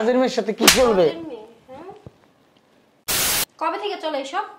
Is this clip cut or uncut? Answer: cut